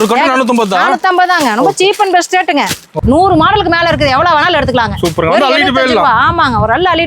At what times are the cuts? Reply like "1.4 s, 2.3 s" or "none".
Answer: 2.9 s